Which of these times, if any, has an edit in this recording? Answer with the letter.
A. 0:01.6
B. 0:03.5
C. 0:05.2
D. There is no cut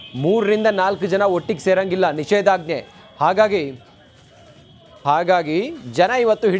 A